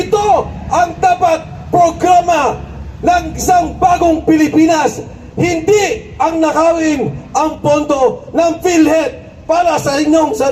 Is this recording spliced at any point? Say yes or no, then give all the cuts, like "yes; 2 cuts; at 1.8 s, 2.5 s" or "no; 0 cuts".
no; 0 cuts